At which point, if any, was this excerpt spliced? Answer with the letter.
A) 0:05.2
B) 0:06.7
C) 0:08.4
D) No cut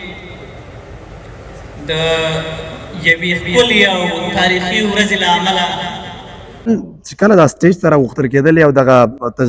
B